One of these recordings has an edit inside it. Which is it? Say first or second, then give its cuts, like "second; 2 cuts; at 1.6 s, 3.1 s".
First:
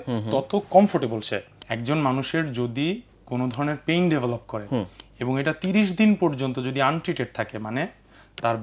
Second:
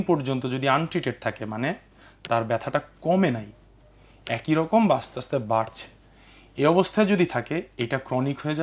first; 1 cut; at 1.6 s